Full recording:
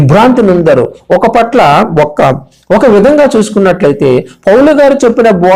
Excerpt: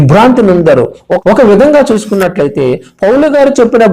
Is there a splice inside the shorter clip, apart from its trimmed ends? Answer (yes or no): yes